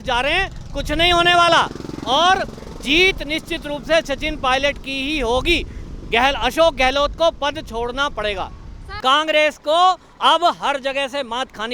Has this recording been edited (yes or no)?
yes